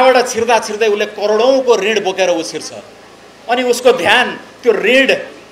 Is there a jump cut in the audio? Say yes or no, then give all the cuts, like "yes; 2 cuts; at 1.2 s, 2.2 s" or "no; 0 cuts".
no; 0 cuts